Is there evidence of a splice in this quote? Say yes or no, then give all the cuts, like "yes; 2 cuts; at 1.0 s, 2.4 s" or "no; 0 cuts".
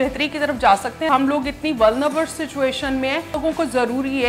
yes; 2 cuts; at 1.1 s, 3.4 s